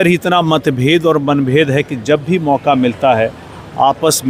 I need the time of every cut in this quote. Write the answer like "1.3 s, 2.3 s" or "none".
none